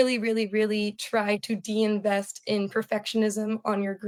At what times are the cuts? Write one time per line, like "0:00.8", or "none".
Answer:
none